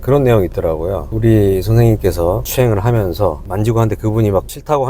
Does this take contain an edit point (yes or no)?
no